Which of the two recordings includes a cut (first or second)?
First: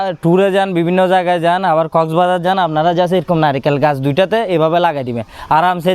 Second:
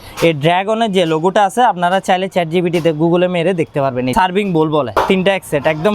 second